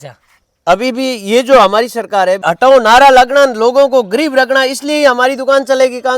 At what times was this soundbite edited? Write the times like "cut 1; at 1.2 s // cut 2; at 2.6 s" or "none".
cut 1; at 2.5 s